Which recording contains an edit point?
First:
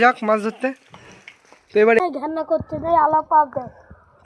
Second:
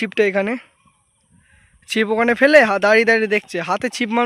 first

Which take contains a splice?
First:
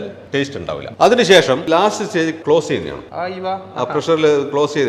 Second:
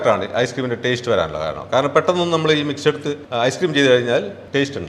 first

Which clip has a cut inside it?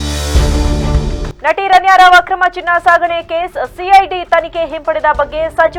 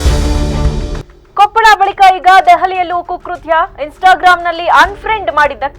second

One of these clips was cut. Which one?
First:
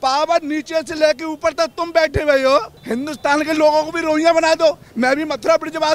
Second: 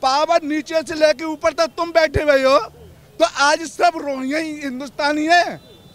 first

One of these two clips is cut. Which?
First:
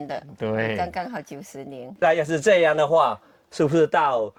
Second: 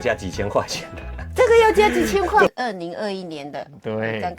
second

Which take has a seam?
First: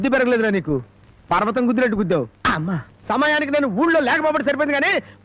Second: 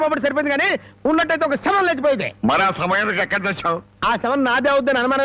first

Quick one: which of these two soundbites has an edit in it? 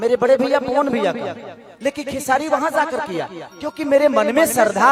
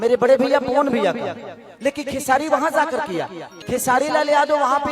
second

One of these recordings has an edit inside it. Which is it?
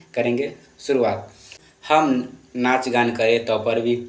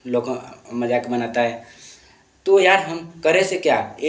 first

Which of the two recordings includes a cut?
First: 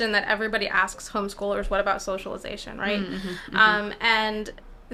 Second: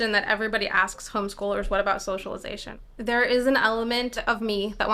second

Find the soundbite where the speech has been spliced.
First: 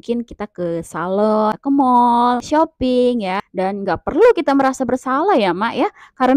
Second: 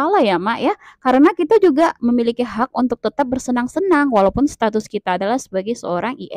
first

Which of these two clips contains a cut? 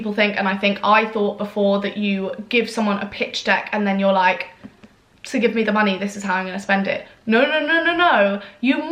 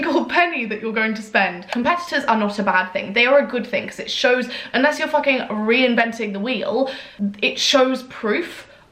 second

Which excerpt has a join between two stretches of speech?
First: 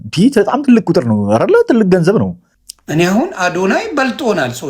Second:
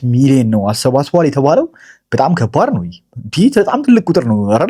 first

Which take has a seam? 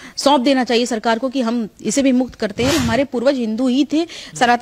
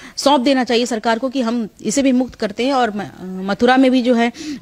first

